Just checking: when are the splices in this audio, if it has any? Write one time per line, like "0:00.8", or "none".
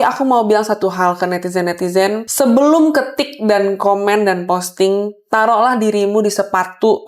none